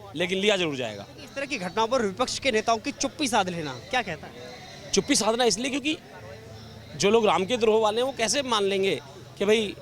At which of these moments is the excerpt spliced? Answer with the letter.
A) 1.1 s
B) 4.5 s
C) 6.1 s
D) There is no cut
D